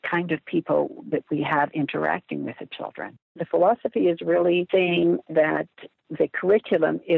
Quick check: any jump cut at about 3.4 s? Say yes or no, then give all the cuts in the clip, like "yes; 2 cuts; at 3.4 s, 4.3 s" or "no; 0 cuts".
yes; 2 cuts; at 3.4 s, 4.7 s